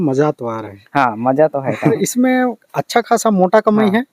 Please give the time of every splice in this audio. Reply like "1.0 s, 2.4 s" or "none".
2.0 s